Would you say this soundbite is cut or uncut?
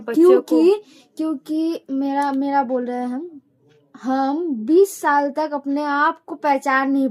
uncut